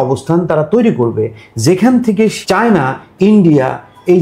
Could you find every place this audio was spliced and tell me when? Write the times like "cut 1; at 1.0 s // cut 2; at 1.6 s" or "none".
cut 1; at 2.4 s